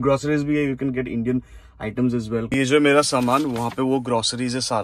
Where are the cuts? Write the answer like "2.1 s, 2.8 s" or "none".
none